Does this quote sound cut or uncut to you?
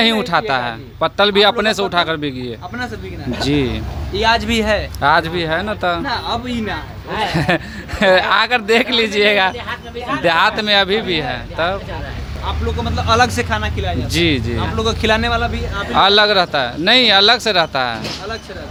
uncut